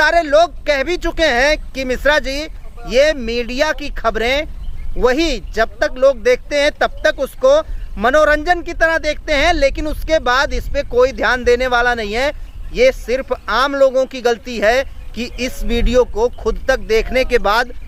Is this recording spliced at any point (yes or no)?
no